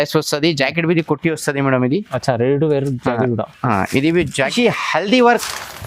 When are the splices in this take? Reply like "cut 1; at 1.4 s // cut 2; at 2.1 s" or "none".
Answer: cut 1; at 4.5 s